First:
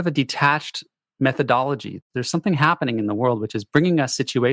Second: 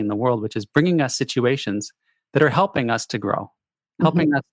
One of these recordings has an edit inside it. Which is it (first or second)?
first